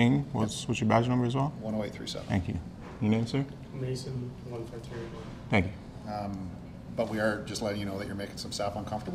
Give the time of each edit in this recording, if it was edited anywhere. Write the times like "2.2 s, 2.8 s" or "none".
none